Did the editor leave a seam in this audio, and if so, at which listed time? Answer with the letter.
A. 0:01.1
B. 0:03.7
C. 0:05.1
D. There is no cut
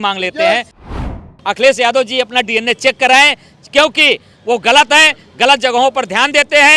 A